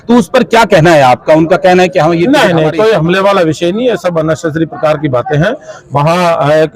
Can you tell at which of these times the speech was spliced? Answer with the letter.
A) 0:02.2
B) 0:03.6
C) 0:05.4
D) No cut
A